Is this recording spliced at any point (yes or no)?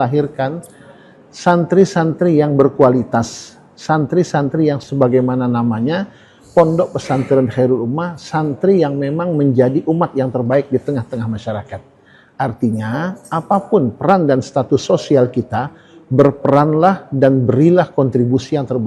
yes